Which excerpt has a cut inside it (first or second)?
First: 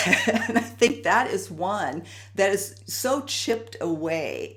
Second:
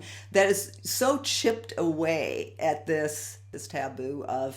second